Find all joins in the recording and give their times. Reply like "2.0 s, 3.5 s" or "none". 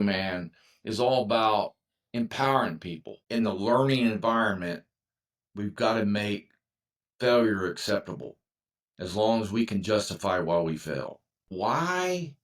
3.1 s, 11.4 s